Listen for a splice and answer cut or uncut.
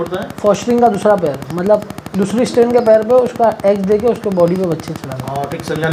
uncut